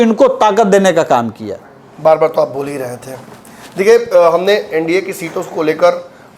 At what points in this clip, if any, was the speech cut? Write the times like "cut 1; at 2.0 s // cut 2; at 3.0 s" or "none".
none